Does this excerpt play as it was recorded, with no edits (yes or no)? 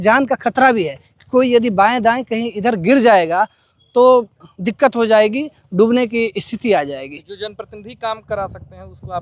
yes